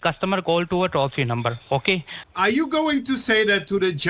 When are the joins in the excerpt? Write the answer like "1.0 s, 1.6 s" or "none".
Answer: 2.2 s